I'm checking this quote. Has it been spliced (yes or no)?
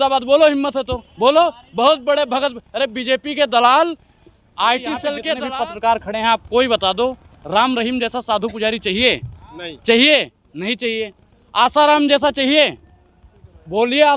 yes